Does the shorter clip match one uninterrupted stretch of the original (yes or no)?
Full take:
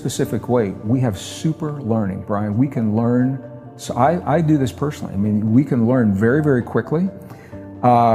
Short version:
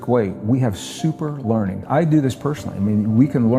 no